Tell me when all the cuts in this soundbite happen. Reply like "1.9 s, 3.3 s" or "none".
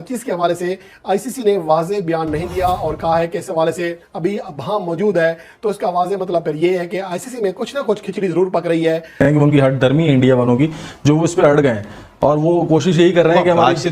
9.2 s